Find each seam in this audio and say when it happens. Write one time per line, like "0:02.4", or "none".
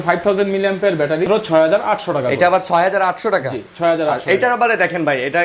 0:01.2